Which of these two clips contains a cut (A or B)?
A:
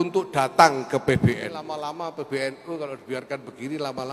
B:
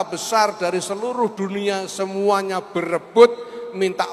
A